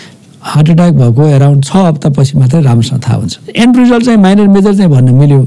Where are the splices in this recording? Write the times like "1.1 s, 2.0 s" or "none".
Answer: 3.3 s